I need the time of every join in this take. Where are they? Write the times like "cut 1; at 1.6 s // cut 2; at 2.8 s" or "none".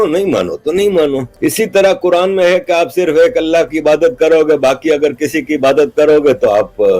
cut 1; at 1.3 s